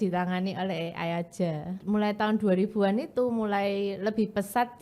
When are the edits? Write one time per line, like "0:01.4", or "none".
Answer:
0:01.8